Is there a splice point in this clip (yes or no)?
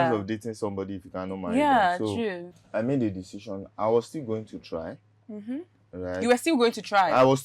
yes